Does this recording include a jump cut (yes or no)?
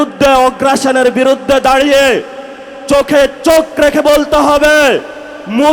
no